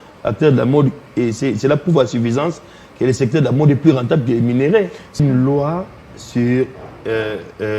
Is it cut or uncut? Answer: cut